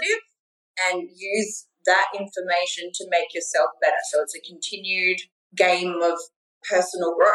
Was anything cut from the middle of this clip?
yes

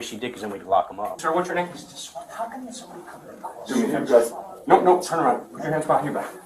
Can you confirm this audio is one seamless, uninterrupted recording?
no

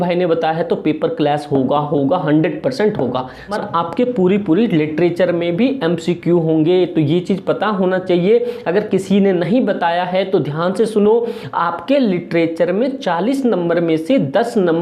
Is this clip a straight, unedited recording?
no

